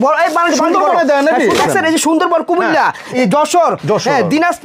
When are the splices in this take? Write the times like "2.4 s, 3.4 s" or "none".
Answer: 1.6 s, 3.1 s